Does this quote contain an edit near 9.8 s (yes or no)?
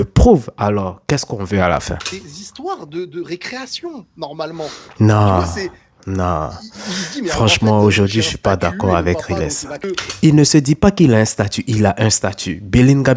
yes